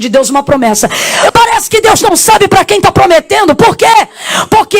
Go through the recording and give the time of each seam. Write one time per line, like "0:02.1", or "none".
0:01.3